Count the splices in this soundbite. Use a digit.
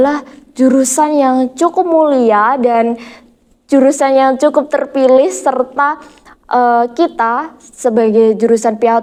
0